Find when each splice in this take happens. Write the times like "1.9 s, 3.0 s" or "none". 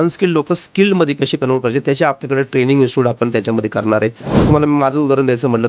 4.3 s